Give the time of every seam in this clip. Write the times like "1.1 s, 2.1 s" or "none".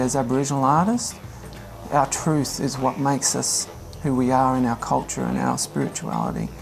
none